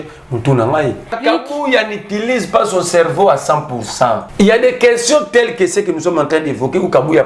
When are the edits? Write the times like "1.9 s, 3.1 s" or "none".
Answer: 1.2 s, 4.3 s